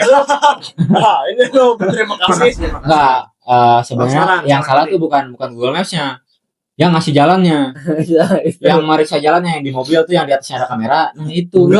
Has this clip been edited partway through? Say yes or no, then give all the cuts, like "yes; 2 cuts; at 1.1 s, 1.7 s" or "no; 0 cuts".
yes; 1 cut; at 2.7 s